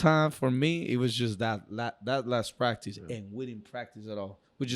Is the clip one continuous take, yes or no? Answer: yes